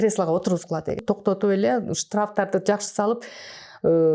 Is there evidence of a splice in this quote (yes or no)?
yes